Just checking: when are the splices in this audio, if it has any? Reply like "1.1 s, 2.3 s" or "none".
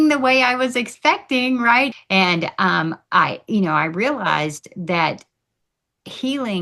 1.9 s